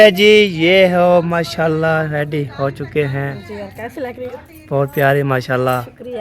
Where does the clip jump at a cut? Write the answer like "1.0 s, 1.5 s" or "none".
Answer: 3.4 s